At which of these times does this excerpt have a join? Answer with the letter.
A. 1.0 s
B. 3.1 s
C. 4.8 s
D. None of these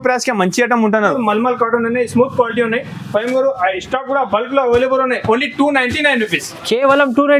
A